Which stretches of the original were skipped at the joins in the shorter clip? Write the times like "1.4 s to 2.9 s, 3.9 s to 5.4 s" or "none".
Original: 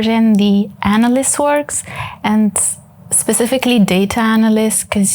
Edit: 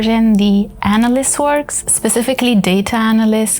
1.8 s to 3.1 s